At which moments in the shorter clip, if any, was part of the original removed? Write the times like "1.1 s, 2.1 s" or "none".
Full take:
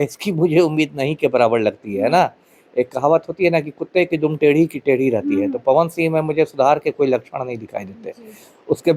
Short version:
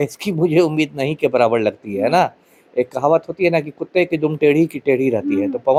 none